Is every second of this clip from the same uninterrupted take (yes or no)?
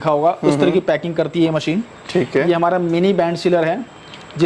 yes